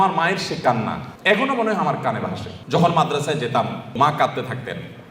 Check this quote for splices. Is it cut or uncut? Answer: cut